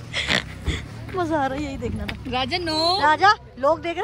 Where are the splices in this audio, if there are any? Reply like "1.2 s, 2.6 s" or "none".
none